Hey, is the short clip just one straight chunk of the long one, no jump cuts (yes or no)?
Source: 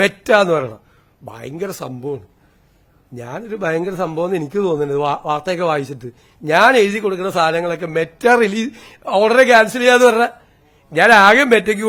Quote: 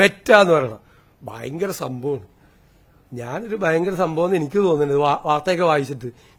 yes